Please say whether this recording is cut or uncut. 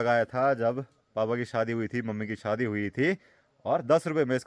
uncut